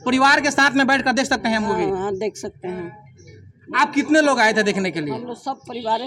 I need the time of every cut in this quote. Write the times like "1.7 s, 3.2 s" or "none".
none